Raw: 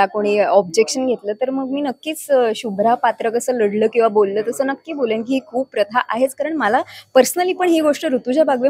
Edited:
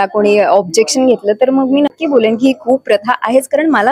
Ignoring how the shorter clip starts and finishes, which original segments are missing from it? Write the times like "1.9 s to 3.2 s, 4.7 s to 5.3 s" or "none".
2.0 s to 4.8 s